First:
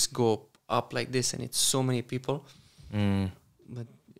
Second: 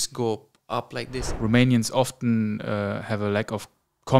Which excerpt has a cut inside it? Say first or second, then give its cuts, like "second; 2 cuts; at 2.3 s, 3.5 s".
second; 1 cut; at 1.2 s